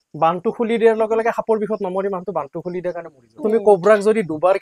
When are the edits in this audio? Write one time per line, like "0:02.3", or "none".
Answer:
0:03.4